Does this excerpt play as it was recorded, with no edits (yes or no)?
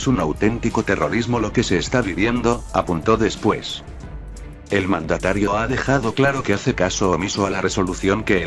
no